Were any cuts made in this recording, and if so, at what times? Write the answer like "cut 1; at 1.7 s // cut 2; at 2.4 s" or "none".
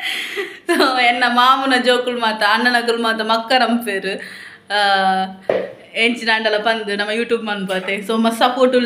none

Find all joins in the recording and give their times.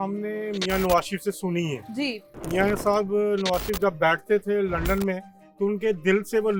none

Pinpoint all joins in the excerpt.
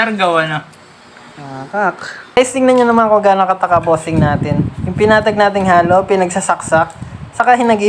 cut 1; at 2.4 s

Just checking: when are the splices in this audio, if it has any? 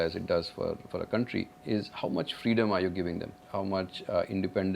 cut 1; at 1.6 s // cut 2; at 3.4 s

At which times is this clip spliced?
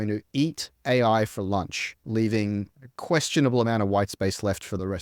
none

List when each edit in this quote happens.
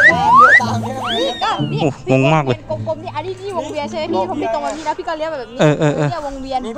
cut 1; at 4.5 s

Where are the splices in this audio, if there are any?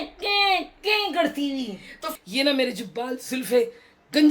cut 1; at 2.0 s

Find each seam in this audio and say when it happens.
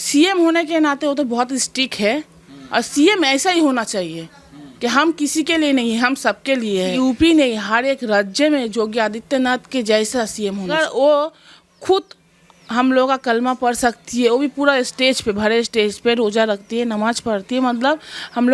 cut 1; at 6.9 s // cut 2; at 10.7 s

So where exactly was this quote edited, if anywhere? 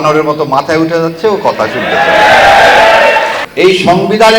cut 1; at 3.4 s

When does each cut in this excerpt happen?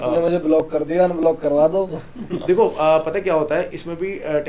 none

